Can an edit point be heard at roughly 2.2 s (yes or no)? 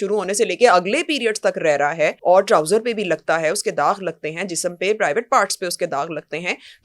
yes